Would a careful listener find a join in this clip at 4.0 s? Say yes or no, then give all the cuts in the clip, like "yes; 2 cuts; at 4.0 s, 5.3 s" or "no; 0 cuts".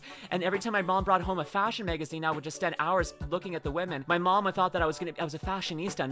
yes; 1 cut; at 4.0 s